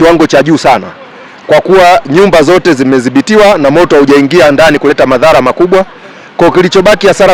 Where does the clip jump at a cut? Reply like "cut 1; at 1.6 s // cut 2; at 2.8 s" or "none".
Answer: none